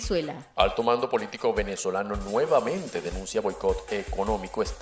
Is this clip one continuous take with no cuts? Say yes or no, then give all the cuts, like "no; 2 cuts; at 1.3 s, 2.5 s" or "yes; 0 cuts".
yes; 0 cuts